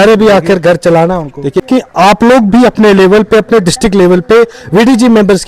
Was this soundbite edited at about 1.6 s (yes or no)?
yes